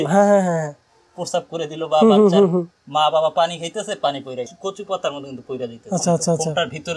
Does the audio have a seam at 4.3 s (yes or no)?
yes